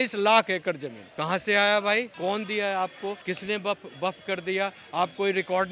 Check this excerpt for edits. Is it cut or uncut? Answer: uncut